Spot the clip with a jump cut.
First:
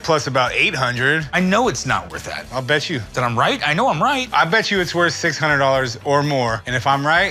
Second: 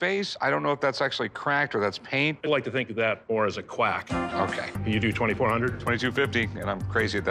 second; 1 cut; at 4.7 s

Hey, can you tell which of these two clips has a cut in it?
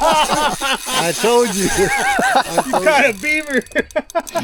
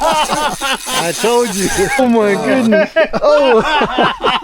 second; 1 cut; at 2.0 s

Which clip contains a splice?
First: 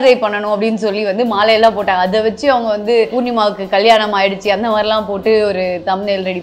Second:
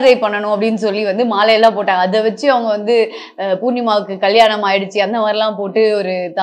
first; 1 cut; at 3.1 s

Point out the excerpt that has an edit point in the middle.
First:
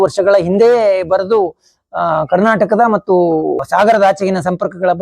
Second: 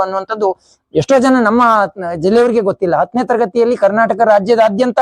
first; 1 cut; at 3.6 s

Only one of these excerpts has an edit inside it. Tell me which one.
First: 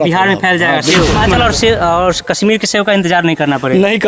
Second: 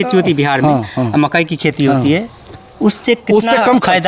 first; 1 cut; at 1.1 s

